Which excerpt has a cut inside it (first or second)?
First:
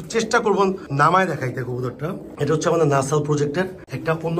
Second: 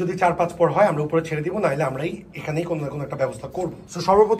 first